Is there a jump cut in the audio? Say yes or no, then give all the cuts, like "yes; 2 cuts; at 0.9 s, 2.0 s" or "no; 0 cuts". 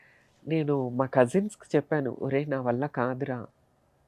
no; 0 cuts